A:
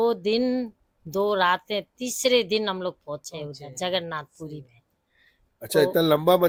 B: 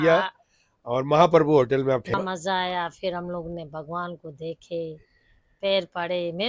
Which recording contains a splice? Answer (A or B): B